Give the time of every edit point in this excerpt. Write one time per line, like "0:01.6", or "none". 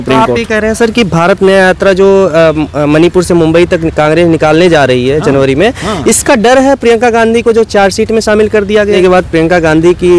0:09.0